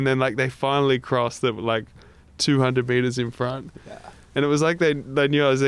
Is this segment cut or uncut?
uncut